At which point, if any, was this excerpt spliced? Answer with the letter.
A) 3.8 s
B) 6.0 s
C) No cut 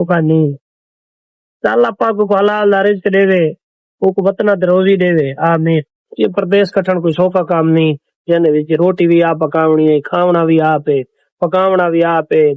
B